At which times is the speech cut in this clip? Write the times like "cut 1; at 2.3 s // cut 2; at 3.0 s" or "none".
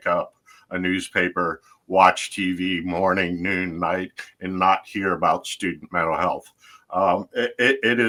none